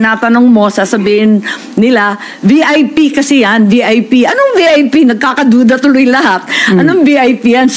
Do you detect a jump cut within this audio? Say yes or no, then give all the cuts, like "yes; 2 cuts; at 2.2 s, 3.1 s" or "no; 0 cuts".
no; 0 cuts